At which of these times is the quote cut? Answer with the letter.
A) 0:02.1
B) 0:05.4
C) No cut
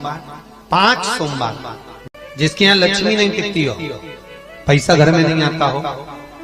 A